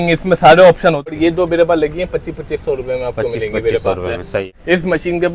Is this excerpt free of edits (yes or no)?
no